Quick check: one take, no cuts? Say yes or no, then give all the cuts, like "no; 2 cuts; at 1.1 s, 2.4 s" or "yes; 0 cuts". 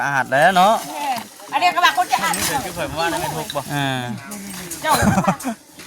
no; 1 cut; at 4.1 s